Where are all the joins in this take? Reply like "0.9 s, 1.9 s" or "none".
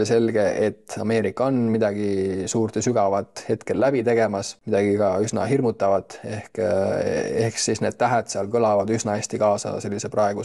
4.5 s